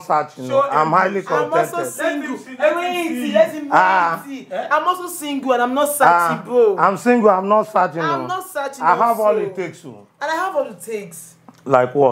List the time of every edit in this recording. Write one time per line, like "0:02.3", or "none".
none